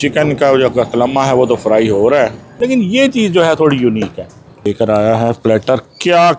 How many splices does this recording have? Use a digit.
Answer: 2